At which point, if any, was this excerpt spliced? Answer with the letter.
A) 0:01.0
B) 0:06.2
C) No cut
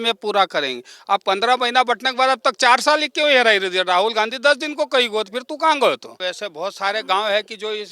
B